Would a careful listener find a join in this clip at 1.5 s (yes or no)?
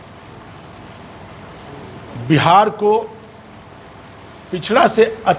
no